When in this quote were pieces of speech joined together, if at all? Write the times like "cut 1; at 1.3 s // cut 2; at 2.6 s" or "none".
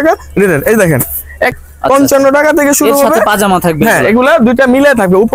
cut 1; at 1.6 s